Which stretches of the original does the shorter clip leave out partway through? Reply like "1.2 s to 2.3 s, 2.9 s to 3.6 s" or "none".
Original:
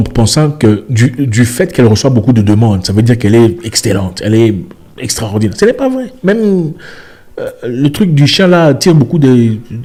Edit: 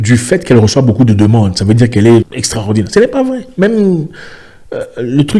3.7 s to 5.0 s